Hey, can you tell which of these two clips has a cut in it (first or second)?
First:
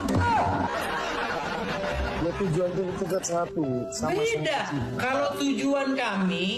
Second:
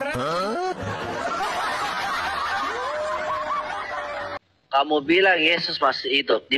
second